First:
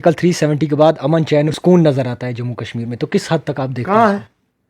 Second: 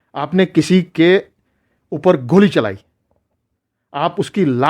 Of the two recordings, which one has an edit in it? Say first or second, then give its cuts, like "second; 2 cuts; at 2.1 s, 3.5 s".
first; 1 cut; at 1.5 s